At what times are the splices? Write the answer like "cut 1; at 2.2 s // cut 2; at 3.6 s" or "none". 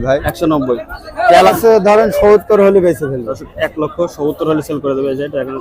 cut 1; at 1.5 s